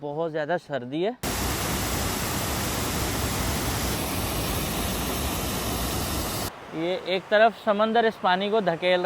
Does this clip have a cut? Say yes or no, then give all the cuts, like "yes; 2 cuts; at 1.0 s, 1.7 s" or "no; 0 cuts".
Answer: yes; 3 cuts; at 1.2 s, 4.0 s, 6.5 s